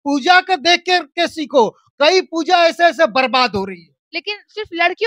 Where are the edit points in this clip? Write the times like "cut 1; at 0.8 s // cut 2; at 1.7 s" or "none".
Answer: none